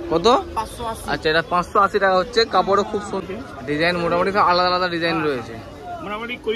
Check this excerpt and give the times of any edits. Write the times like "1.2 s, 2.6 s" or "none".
3.2 s

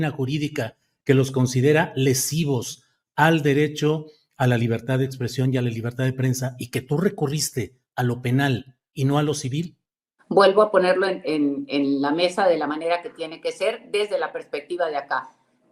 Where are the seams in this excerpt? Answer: none

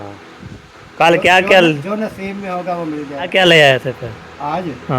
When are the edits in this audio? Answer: 3.3 s

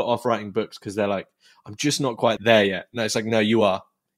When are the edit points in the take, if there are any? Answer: 2.4 s

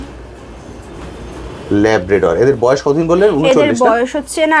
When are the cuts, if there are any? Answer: none

